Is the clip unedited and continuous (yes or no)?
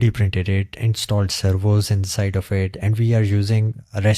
yes